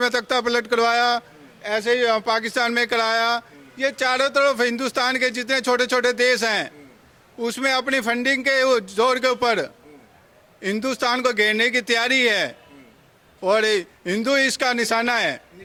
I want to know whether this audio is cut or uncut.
uncut